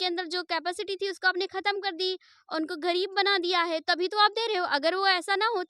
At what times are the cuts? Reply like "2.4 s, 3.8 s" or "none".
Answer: none